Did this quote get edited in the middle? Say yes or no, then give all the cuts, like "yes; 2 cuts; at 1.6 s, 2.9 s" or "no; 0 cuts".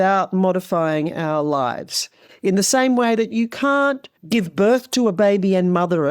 yes; 1 cut; at 4.1 s